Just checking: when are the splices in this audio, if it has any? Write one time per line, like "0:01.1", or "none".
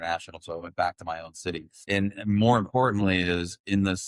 0:01.7